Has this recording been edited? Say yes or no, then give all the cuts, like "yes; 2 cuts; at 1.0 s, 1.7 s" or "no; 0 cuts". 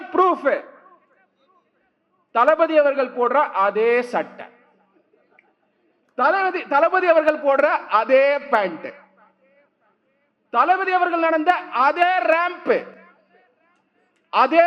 no; 0 cuts